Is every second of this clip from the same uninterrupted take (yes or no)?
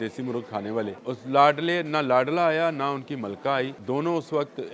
no